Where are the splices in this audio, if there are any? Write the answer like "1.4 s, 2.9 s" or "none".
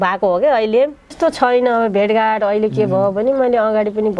1.2 s